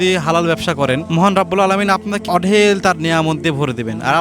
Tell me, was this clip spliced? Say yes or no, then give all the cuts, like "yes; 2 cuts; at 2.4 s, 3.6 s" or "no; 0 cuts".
yes; 2 cuts; at 1.0 s, 2.2 s